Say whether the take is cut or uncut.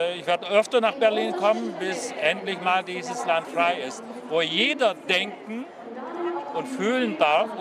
uncut